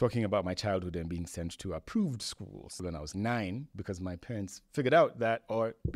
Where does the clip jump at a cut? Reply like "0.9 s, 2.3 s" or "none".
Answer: 2.7 s

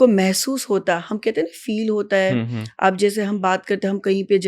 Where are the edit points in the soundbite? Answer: none

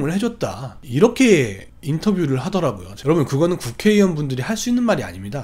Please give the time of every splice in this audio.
2.9 s

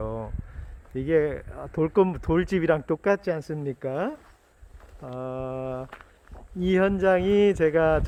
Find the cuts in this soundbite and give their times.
none

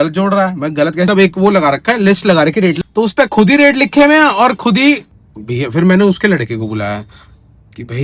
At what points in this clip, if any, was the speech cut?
1.1 s, 2.8 s, 5.1 s

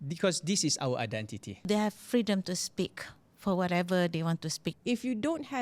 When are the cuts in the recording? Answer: 1.7 s, 4.7 s

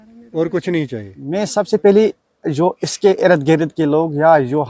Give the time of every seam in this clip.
1.1 s

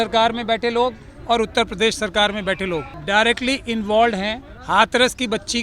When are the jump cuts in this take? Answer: 2.9 s, 4.5 s

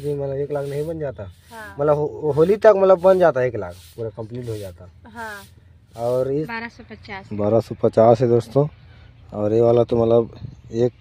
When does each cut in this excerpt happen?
6.5 s

